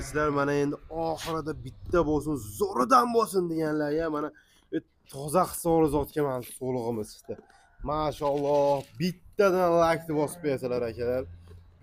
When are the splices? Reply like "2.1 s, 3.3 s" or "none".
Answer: none